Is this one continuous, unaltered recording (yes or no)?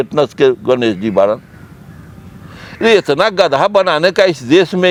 yes